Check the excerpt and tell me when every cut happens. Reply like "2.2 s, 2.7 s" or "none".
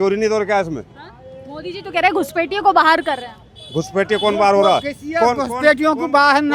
none